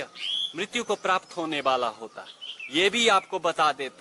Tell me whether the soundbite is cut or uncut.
uncut